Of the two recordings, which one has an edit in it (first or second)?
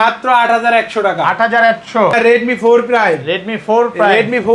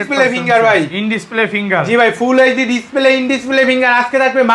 first